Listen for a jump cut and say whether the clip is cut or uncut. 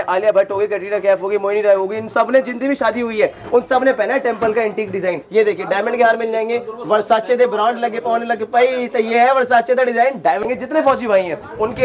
cut